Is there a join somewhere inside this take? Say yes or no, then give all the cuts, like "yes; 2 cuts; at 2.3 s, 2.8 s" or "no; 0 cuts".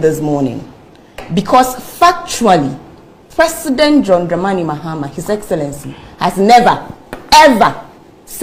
no; 0 cuts